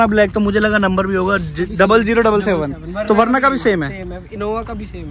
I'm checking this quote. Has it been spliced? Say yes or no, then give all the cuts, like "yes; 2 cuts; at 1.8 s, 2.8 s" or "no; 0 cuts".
no; 0 cuts